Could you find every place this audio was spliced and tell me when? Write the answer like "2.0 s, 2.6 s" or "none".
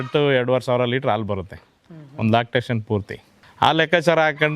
none